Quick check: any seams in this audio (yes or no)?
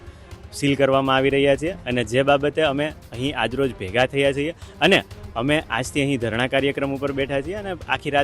no